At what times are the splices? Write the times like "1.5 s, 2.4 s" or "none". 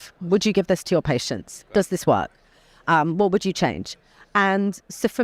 none